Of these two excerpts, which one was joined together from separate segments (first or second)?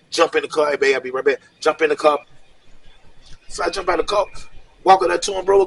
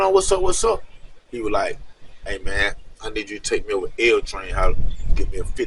first